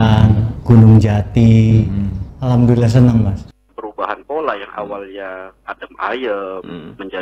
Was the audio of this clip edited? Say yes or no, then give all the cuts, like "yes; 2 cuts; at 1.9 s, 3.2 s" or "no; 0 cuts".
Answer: yes; 1 cut; at 3.5 s